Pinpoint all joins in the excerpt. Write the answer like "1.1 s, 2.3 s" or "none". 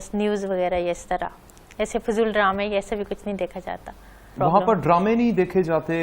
4.3 s